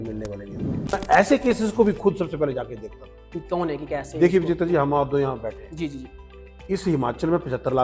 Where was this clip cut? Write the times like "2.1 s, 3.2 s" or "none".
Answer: 0.9 s